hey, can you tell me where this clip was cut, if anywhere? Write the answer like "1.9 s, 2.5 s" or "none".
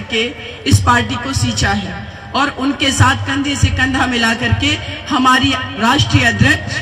none